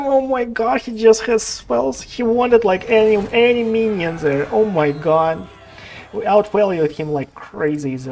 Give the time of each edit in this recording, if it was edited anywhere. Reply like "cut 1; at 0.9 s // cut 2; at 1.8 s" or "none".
none